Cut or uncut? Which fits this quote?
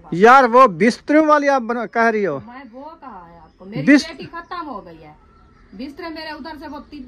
uncut